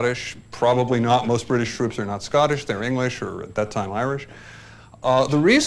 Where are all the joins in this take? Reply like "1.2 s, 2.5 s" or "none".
none